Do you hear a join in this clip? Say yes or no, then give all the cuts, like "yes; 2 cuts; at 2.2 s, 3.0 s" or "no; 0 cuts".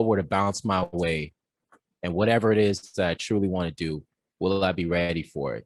no; 0 cuts